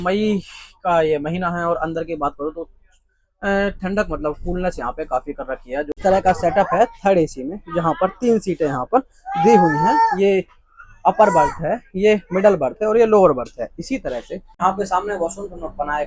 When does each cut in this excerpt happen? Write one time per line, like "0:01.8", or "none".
0:05.9
0:14.5